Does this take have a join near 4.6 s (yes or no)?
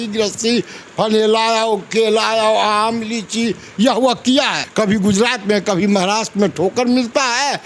yes